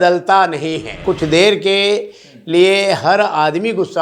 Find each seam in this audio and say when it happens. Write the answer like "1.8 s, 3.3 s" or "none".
1.0 s